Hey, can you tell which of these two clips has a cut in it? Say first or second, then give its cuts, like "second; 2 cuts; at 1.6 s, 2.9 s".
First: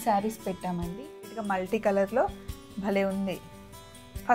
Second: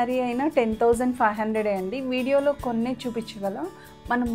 first; 1 cut; at 1.4 s